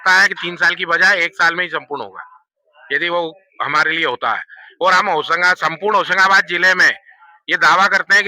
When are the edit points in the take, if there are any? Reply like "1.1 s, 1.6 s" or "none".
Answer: none